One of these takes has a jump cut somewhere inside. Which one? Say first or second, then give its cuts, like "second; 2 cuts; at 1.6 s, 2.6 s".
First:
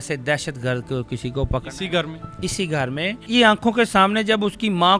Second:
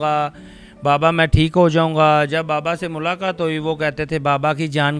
first; 1 cut; at 3.2 s